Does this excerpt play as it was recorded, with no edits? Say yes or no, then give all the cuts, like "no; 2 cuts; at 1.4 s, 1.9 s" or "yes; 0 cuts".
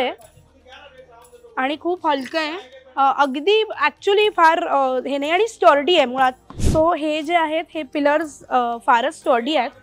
no; 1 cut; at 6.5 s